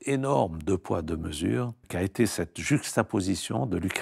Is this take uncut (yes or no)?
no